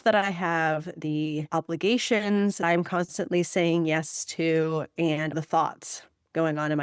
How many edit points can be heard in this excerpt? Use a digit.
3